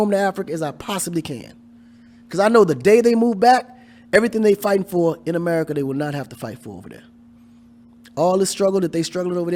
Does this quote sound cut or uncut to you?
uncut